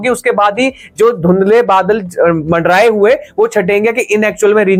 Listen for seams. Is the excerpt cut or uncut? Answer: uncut